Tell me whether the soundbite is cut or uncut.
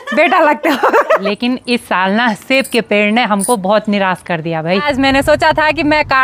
cut